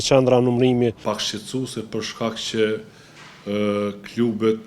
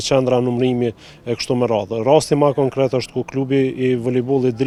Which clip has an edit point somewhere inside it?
first; 1 cut; at 1.1 s

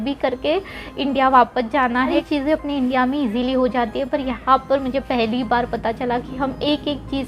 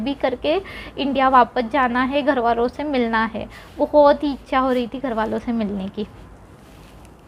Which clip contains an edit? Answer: first; 1 cut; at 2.2 s

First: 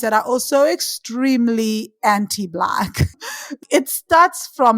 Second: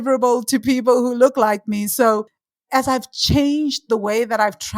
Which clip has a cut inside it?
second; 1 cut; at 2.5 s

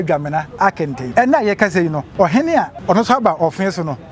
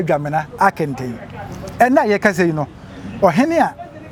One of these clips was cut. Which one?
first; 3 cuts; at 1.0 s, 2.0 s, 2.8 s

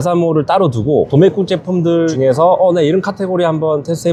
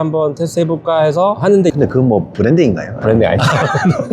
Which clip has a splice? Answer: second; 1 cut; at 1.7 s

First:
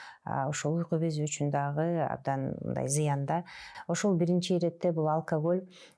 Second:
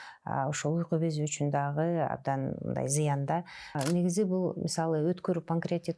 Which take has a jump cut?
second; 1 cut; at 3.7 s

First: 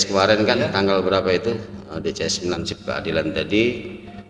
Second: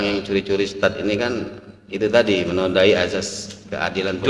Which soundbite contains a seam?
first; 1 cut; at 2.6 s

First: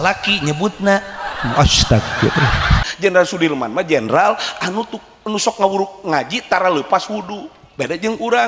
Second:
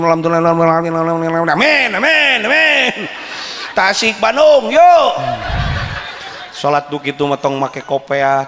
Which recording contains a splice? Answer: first; 1 cut; at 2.9 s

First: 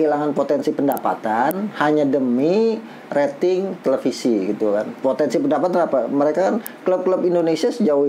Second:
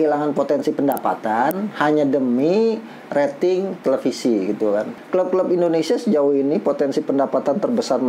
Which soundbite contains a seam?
second; 1 cut; at 4.9 s

